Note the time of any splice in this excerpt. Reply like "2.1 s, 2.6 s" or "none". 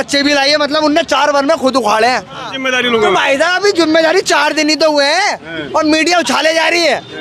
2.5 s